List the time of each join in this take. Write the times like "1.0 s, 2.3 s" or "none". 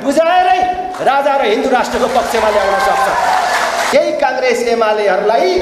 3.9 s